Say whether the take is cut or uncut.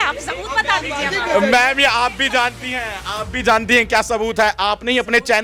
uncut